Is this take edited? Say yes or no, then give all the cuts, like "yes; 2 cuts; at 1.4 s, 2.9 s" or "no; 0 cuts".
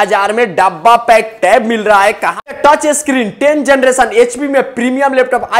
yes; 1 cut; at 2.3 s